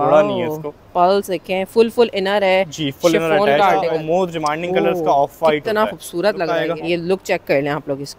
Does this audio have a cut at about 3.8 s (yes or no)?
yes